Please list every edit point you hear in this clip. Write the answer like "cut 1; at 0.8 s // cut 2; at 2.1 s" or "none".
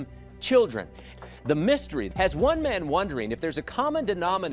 cut 1; at 1.1 s // cut 2; at 2.1 s